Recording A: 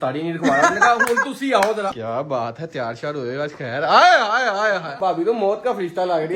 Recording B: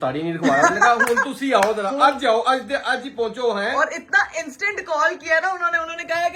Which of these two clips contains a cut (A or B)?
A